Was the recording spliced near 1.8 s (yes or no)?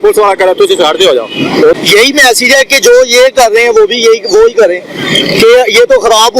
yes